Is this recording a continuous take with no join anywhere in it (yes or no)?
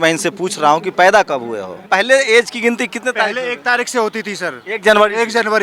no